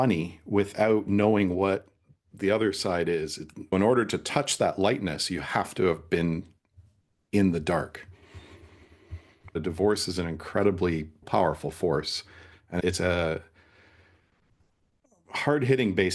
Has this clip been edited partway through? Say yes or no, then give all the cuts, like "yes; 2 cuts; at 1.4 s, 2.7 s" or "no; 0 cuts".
yes; 2 cuts; at 3.7 s, 9.5 s